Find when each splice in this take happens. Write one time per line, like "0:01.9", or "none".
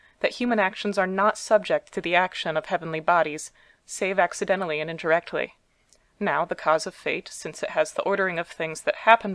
0:01.7